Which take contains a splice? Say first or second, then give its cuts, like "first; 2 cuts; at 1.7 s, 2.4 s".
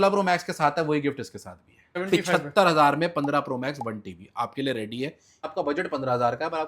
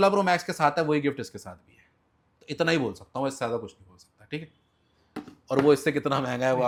first; 2 cuts; at 2.0 s, 5.5 s